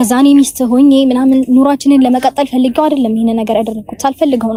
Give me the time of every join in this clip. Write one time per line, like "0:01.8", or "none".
none